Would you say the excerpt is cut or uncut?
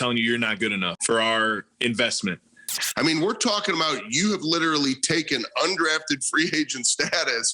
cut